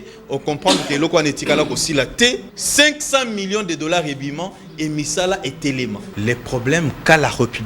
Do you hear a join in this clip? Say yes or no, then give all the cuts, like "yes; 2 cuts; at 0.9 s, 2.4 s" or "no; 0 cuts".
yes; 2 cuts; at 2.6 s, 6.1 s